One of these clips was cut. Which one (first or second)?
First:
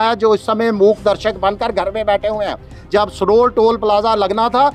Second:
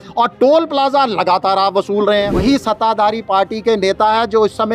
second